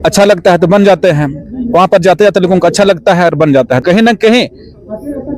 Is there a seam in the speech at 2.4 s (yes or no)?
no